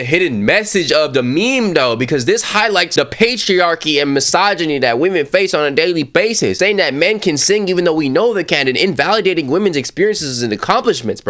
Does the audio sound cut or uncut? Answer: uncut